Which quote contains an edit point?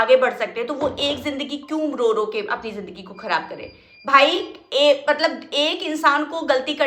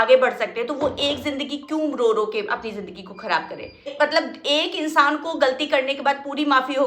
second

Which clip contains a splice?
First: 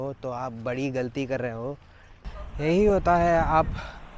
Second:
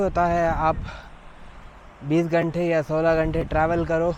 first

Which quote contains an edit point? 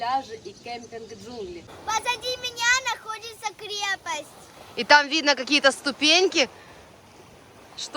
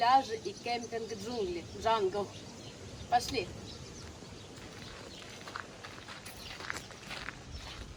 first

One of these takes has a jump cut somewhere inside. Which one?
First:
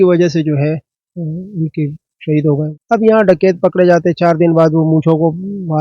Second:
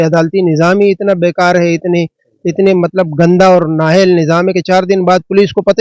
first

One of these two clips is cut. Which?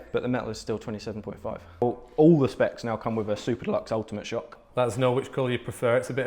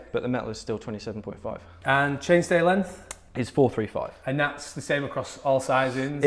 first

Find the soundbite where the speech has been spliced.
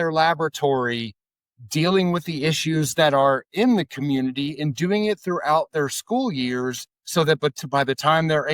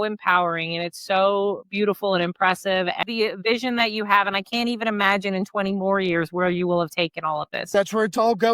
second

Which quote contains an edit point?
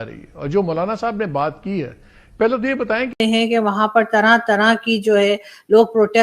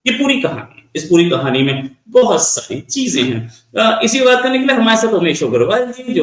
first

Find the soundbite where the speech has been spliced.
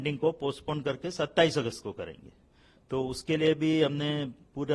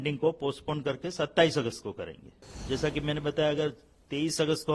second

